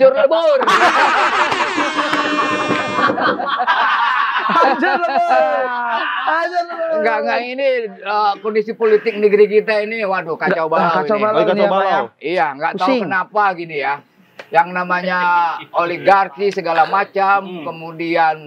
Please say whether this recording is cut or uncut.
uncut